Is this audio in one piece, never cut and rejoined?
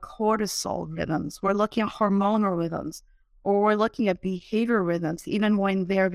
yes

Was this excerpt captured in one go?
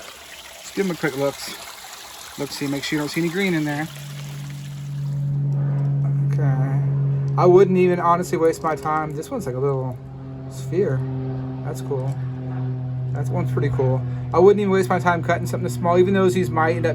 no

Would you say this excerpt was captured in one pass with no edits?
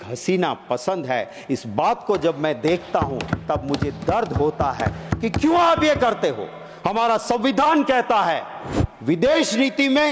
yes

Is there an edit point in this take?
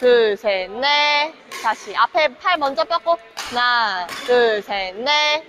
no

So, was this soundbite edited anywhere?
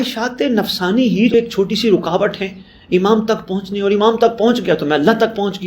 yes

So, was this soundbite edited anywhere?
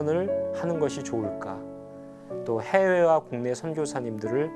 no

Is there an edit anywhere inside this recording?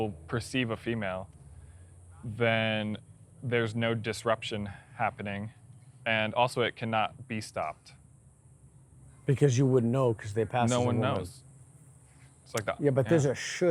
no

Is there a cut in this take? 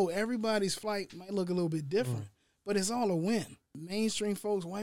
yes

